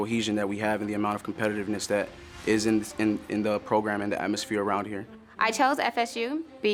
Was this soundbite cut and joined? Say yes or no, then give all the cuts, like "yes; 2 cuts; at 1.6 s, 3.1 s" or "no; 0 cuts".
no; 0 cuts